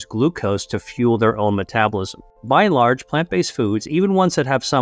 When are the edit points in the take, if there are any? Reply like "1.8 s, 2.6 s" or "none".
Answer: 2.3 s